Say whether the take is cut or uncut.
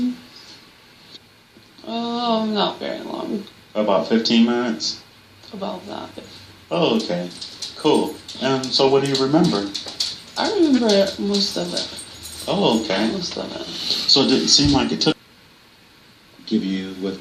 uncut